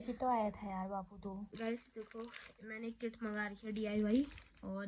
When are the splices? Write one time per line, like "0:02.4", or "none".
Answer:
0:01.5